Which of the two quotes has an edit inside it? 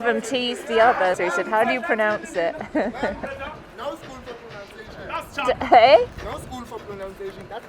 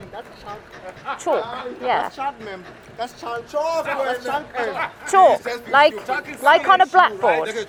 first; 1 cut; at 1.2 s

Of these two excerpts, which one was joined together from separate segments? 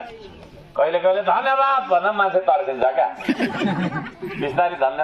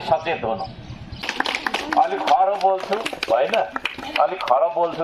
second; 1 cut; at 1.2 s

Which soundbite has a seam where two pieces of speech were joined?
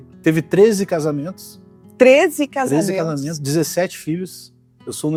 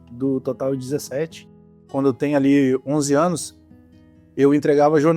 second; 1 cut; at 1.8 s

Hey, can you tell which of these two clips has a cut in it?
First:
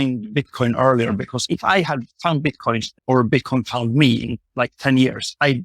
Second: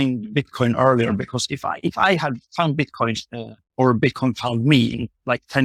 first; 2 cuts; at 1.4 s, 2.9 s

